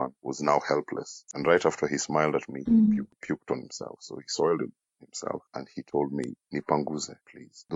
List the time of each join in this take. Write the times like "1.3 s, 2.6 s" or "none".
1.2 s